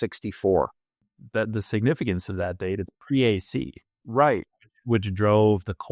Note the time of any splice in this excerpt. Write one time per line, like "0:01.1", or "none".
0:01.0
0:03.0

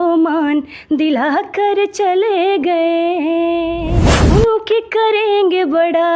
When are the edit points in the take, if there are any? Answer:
0:03.9

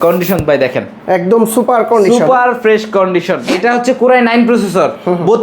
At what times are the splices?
0:03.5

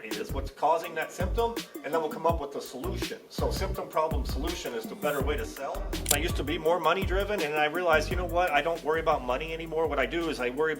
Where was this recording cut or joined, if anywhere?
0:06.1

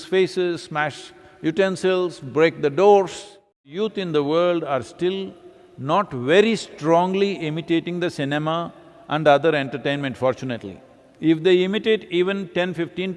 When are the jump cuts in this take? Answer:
0:03.7

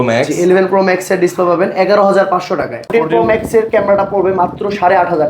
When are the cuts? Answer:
0:02.9

